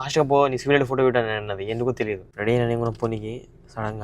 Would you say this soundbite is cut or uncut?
cut